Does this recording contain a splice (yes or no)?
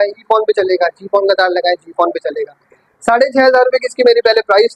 no